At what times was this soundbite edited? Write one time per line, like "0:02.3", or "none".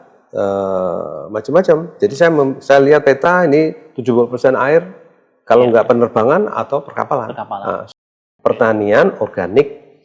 0:07.9